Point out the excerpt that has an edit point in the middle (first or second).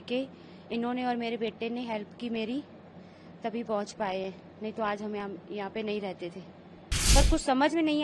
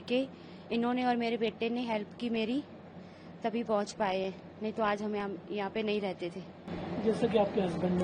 first